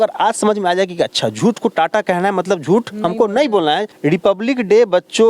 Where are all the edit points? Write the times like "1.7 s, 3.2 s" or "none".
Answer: 3.9 s